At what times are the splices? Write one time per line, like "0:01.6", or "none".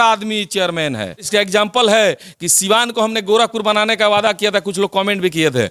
0:01.3